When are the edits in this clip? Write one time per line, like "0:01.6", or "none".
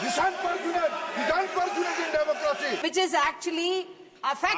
0:02.8